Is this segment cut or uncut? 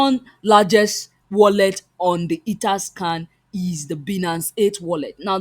uncut